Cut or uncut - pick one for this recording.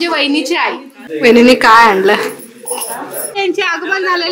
cut